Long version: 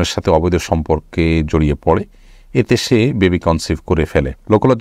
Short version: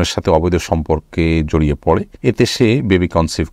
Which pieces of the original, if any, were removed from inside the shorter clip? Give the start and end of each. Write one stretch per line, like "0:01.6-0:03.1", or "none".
0:02.1-0:02.4